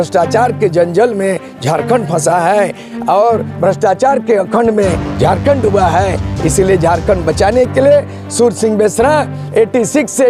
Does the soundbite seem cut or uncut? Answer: uncut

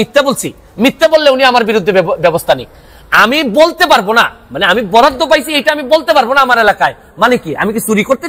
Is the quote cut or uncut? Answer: uncut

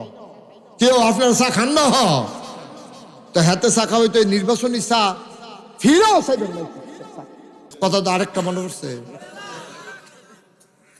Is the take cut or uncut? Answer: cut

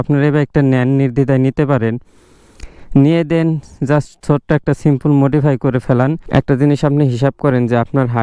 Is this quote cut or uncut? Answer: cut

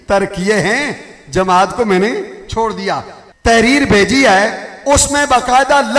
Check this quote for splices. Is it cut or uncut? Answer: cut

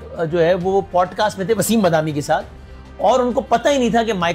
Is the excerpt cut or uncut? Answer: uncut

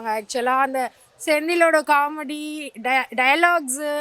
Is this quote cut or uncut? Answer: uncut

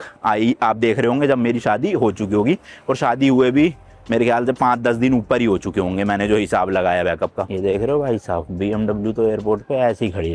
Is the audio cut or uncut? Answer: cut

